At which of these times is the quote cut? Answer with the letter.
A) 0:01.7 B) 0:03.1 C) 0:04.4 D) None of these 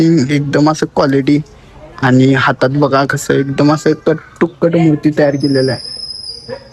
D